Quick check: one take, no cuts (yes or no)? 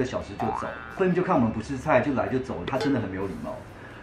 no